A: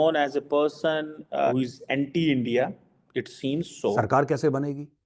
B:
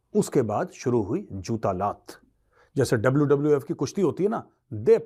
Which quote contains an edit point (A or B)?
A